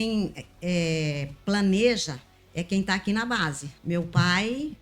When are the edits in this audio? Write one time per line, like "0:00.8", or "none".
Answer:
0:03.7